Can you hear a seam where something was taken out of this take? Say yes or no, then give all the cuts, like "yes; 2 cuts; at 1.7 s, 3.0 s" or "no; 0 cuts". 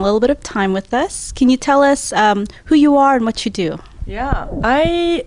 no; 0 cuts